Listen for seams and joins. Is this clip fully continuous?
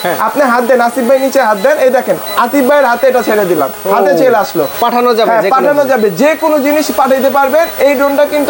yes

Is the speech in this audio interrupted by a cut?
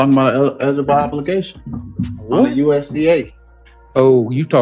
no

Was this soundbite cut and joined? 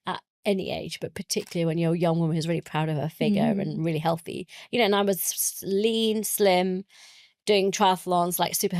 no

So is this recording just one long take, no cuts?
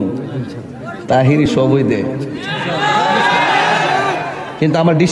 yes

